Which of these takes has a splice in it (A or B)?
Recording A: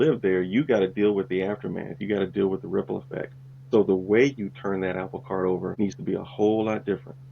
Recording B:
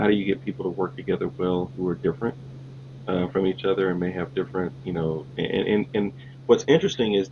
A